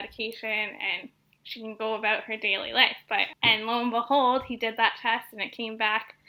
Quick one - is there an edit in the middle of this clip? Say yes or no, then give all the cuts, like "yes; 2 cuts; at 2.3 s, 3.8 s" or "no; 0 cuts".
no; 0 cuts